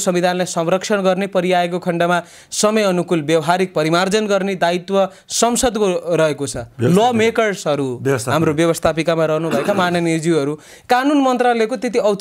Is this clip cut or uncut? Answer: uncut